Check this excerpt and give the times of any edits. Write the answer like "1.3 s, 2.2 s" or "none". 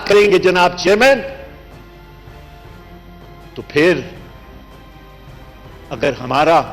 1.9 s, 3.4 s